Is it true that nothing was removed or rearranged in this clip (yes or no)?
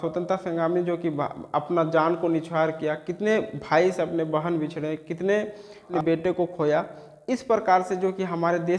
no